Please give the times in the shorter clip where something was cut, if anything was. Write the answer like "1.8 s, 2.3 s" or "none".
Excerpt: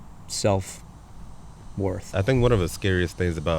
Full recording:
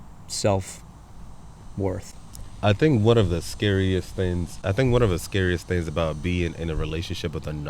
2.0 s